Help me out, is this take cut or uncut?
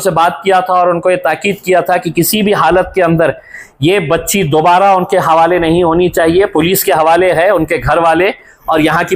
uncut